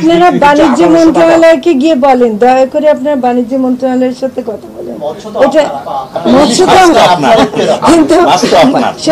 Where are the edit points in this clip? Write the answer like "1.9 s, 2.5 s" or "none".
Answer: none